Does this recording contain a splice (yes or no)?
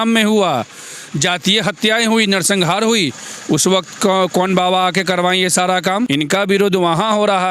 yes